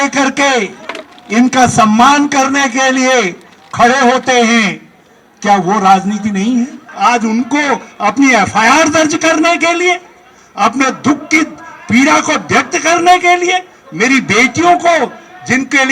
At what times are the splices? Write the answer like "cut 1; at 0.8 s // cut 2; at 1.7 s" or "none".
cut 1; at 6.8 s